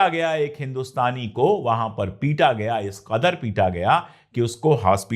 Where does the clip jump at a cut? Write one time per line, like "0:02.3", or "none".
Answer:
none